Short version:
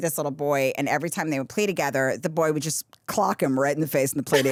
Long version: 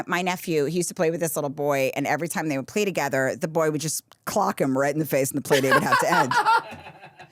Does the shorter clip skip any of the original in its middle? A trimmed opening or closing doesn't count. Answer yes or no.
no